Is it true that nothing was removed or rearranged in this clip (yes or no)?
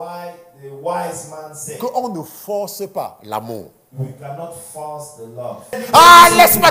no